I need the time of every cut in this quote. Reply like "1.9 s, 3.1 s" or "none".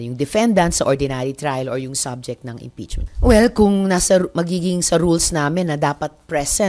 3.0 s